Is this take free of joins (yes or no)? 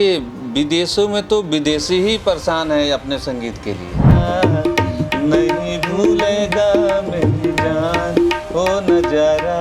no